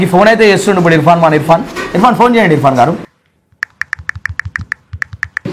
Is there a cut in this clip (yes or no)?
no